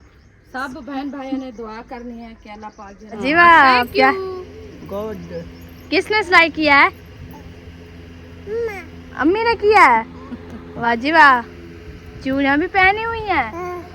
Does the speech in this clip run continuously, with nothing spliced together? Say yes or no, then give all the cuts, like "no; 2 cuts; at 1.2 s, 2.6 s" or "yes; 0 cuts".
no; 2 cuts; at 3.2 s, 10.9 s